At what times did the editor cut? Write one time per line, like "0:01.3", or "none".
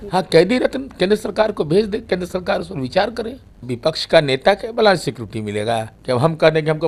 0:03.7
0:05.9